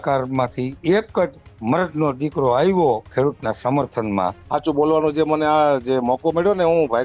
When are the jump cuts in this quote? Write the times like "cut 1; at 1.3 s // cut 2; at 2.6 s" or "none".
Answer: cut 1; at 4.4 s